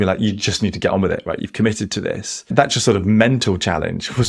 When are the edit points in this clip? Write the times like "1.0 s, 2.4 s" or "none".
2.3 s